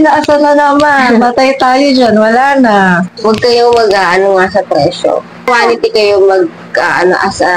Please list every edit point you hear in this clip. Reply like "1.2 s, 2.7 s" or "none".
3.1 s, 5.5 s